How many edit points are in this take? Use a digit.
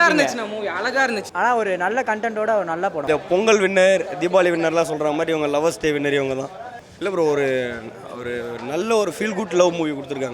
2